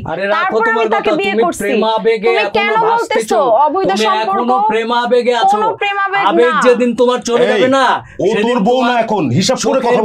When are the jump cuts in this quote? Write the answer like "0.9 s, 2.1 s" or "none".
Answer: none